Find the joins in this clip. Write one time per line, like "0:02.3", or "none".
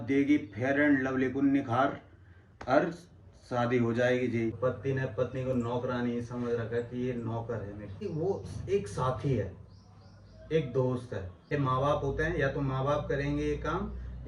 0:04.6
0:08.0
0:11.5